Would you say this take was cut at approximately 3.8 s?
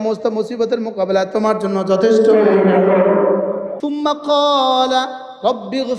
yes; 1 cut; at 3.8 s

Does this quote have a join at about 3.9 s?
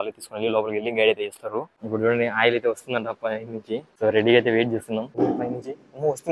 yes; 3 cuts; at 1.8 s, 3.9 s, 5.2 s

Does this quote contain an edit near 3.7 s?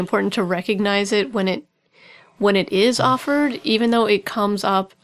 no; 0 cuts

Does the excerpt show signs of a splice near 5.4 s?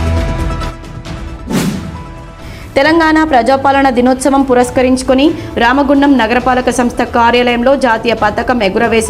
no; 1 cut; at 2.0 s

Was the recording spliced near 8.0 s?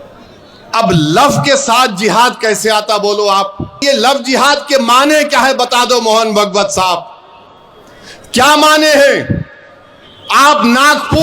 no; 1 cut; at 3.8 s

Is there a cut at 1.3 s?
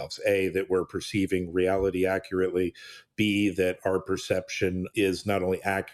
no; 1 cut; at 4.9 s

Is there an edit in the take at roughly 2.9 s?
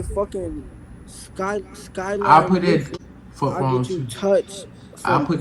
yes; 1 cut; at 2.9 s

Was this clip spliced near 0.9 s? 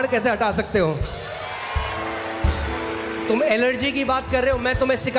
no; 0 cuts

